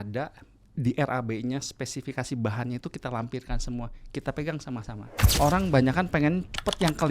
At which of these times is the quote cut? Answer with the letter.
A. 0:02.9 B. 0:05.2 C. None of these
B